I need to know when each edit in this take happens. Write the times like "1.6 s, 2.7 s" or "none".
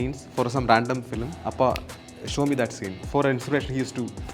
1.4 s, 2.9 s